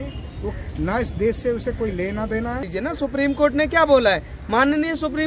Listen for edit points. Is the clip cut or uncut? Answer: cut